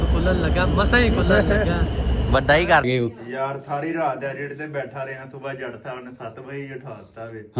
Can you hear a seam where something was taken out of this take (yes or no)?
yes